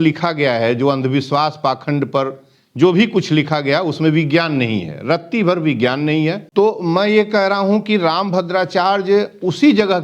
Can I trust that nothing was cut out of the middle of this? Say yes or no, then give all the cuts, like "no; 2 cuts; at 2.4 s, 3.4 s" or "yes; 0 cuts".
no; 1 cut; at 6.4 s